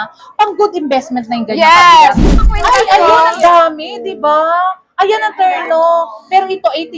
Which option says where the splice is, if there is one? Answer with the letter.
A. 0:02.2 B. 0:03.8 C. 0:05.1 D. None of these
A